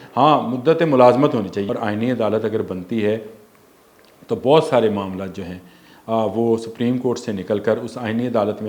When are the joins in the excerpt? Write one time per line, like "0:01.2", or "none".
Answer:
0:01.6